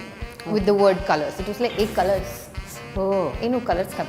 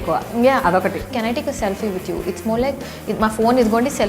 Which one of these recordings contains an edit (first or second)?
second